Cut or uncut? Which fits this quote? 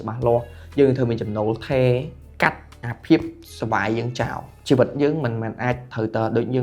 cut